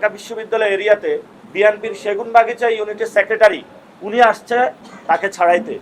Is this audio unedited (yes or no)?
no